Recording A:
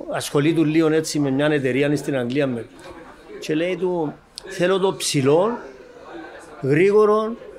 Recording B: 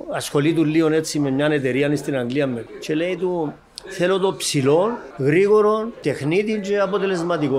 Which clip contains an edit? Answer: B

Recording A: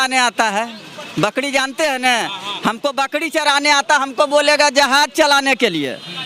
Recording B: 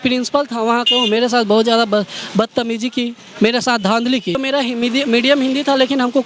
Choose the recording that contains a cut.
B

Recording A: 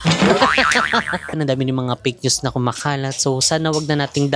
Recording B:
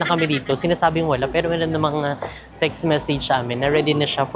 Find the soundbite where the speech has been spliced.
A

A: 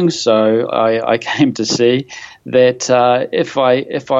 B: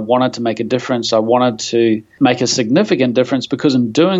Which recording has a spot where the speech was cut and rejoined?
B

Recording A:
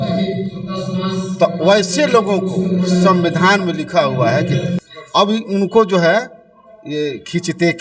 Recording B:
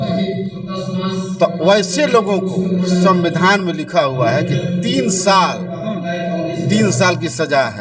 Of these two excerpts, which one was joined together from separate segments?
A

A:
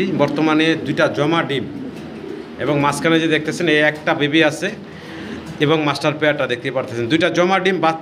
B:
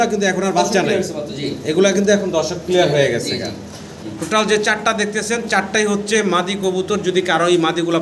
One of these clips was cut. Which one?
B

